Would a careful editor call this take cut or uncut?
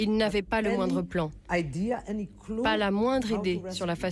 uncut